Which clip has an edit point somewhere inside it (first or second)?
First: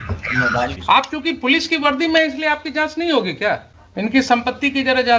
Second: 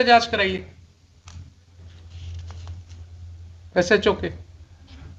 first